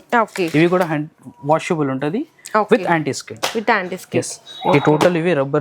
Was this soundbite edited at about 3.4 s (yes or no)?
no